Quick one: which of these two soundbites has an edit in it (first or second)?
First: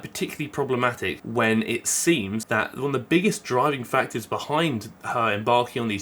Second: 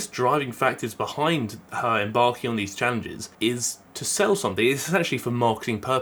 first